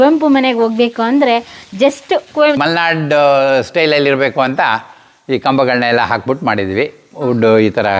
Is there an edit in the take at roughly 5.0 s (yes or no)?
no